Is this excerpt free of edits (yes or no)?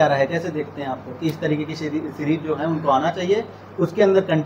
yes